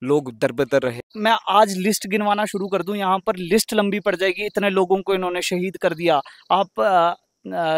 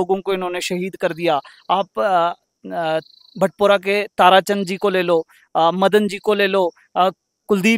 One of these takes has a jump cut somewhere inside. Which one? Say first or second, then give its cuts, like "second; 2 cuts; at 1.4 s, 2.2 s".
first; 1 cut; at 1.1 s